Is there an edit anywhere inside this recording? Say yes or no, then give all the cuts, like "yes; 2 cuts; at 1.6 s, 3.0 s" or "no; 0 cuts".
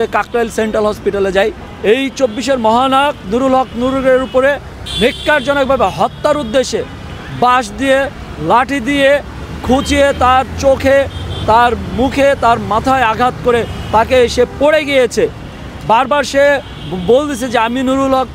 yes; 1 cut; at 1.7 s